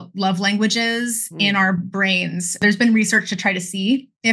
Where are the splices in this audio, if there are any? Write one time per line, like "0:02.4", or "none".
0:02.6